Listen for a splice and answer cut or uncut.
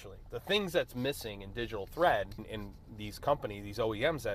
cut